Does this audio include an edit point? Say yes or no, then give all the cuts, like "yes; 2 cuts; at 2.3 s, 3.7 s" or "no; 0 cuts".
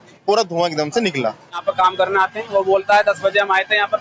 yes; 1 cut; at 1.6 s